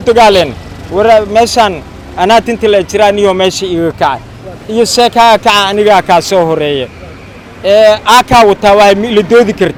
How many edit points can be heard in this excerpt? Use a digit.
0